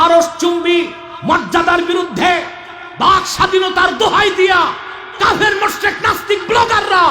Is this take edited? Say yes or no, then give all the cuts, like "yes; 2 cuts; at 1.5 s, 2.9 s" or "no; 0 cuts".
no; 0 cuts